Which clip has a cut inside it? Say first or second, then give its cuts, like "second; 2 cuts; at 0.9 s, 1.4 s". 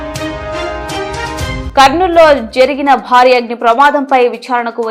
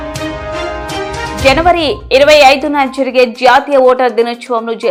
first; 1 cut; at 1.4 s